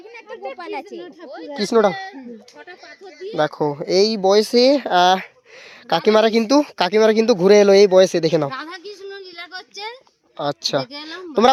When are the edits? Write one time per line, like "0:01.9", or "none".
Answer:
none